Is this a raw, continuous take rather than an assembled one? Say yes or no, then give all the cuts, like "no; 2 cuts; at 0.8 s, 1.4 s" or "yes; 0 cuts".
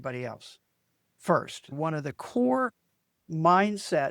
no; 1 cut; at 1.8 s